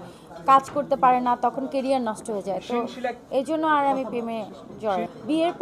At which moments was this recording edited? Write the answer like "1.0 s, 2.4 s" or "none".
none